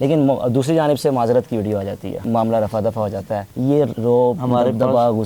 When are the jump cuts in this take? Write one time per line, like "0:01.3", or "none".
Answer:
0:02.1
0:03.8